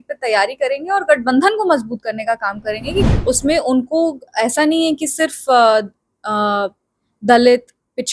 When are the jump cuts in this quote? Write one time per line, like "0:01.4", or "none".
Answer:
0:03.1